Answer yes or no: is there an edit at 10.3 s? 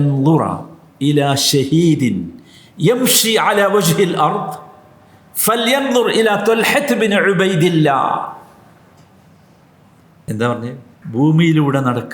yes